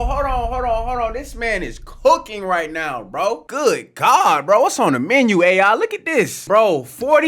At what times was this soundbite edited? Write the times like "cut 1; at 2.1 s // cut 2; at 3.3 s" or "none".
cut 1; at 6.4 s

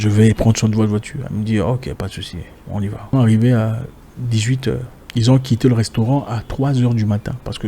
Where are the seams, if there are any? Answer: cut 1; at 3.1 s // cut 2; at 5.0 s

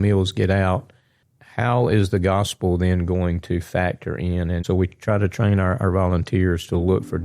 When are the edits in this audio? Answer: cut 1; at 4.6 s

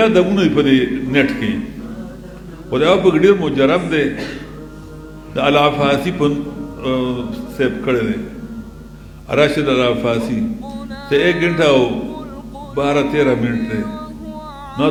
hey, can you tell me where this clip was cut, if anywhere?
none

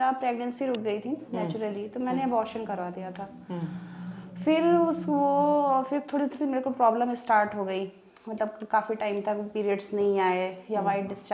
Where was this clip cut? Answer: none

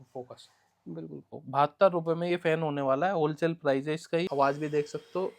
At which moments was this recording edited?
cut 1; at 1.3 s // cut 2; at 4.3 s

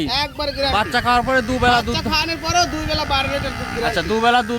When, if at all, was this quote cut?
none

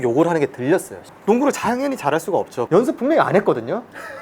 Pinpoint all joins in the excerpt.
cut 1; at 1.0 s // cut 2; at 2.6 s

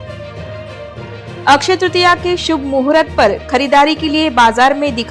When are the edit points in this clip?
cut 1; at 1.1 s

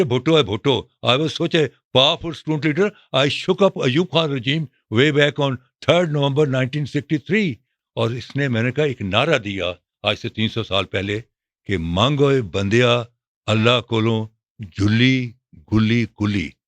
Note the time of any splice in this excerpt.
cut 1; at 7.7 s

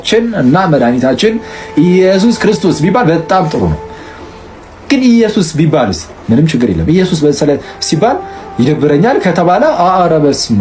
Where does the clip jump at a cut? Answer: none

